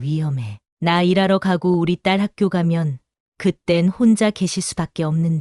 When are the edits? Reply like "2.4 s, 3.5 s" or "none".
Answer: none